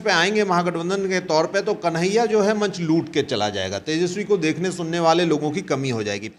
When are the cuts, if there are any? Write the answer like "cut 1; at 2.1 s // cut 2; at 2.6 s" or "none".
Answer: none